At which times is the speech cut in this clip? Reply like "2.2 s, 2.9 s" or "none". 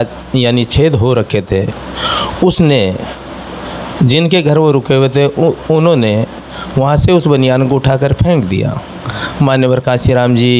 none